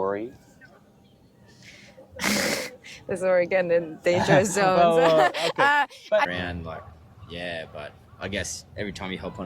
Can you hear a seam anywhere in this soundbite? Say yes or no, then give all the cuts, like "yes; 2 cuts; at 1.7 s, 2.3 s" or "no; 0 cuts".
yes; 1 cut; at 6.3 s